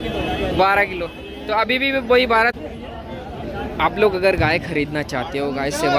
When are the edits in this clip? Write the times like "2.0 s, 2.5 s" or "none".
2.5 s